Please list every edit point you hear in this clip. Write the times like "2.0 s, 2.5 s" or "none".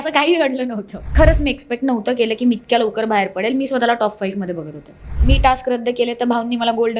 1.1 s, 5.1 s